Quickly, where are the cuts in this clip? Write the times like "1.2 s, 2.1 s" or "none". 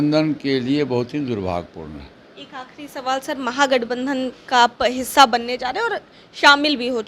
none